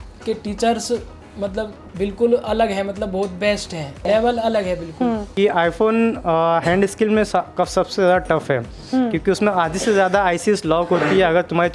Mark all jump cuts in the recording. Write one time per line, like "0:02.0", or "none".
0:01.8
0:04.0
0:05.3